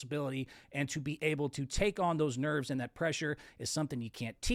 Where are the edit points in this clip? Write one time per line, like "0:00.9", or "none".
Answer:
none

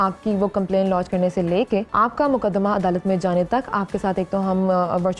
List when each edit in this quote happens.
0:01.9

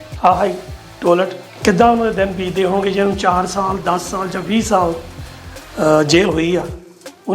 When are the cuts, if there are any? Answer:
0:01.5

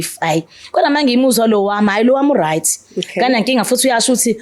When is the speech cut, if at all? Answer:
none

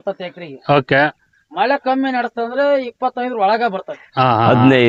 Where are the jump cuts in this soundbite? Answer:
none

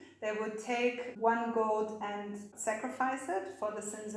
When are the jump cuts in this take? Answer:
0:01.1
0:02.5

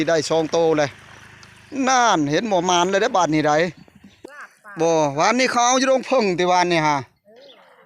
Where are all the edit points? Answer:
0:04.1

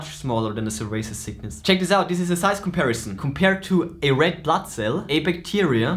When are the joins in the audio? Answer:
0:01.5
0:03.2

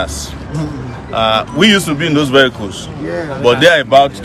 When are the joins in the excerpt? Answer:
none

